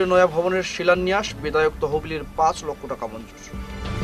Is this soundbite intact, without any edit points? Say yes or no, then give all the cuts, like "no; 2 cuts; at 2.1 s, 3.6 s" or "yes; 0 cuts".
yes; 0 cuts